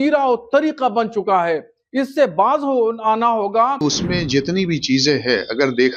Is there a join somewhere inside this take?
yes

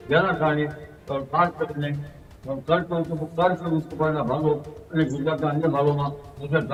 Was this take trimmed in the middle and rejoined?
no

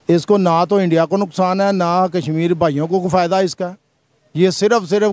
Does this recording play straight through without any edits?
yes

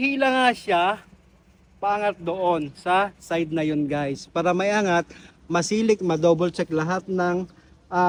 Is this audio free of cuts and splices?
yes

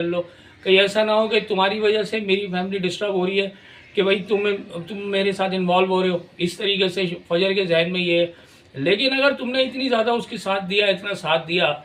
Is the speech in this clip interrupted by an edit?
no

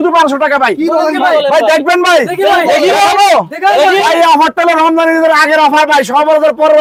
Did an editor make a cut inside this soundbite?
no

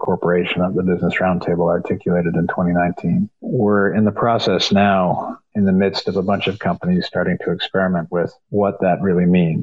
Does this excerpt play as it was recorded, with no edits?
no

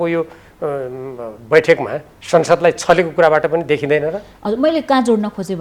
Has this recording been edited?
no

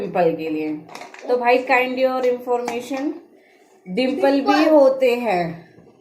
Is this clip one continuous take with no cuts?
yes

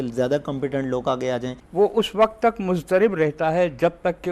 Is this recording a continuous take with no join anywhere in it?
no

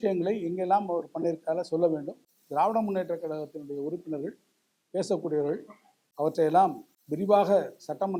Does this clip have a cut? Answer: no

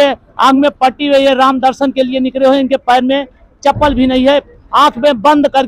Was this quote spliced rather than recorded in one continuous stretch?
no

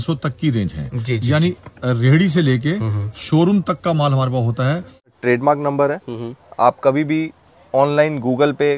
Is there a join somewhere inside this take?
yes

